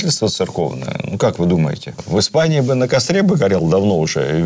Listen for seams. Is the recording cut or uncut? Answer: uncut